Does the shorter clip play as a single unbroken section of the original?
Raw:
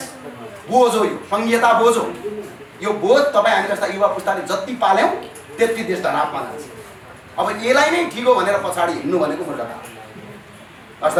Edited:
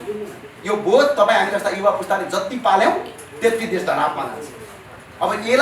yes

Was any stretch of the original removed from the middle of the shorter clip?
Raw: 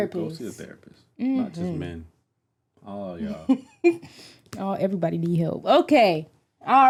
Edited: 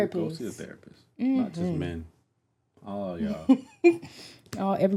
no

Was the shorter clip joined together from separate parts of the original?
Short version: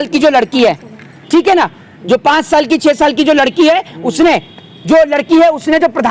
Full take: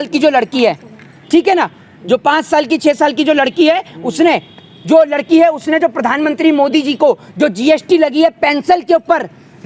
no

